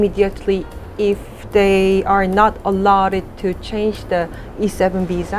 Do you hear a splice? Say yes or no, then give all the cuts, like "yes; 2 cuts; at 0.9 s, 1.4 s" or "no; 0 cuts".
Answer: no; 0 cuts